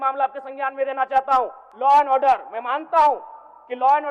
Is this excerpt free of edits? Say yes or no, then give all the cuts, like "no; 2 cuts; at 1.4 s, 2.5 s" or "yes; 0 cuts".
no; 1 cut; at 1.6 s